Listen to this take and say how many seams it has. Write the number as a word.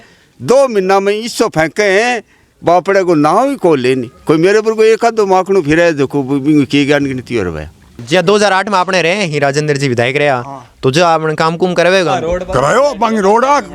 one